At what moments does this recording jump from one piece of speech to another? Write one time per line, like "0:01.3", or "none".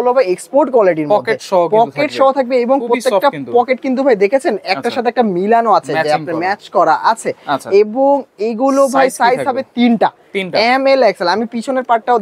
none